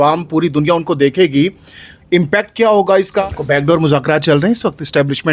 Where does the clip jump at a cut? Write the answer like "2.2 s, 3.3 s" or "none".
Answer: 3.2 s